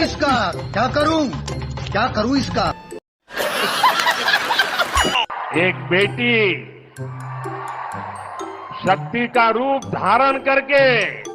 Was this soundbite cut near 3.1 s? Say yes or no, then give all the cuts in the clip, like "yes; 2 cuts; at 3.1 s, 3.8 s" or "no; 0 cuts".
yes; 2 cuts; at 3.1 s, 5.1 s